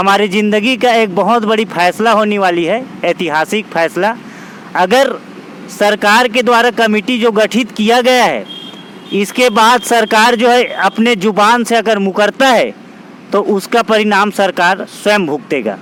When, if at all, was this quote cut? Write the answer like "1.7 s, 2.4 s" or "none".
none